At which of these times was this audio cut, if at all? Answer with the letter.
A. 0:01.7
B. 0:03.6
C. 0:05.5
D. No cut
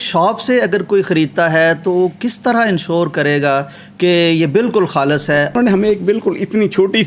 C